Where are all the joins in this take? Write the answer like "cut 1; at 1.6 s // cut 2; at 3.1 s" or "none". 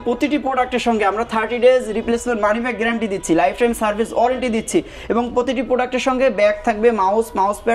none